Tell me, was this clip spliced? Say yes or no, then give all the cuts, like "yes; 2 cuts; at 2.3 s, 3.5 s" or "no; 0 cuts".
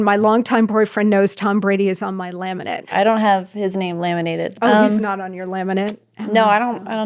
yes; 2 cuts; at 2.9 s, 4.5 s